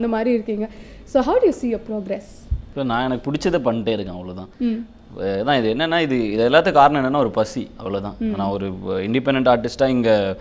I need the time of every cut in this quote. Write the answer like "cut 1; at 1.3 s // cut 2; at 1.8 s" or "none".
cut 1; at 5.2 s